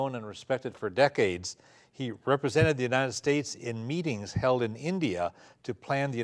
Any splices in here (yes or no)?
no